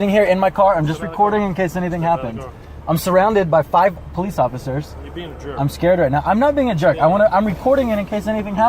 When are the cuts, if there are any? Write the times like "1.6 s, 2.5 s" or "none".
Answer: none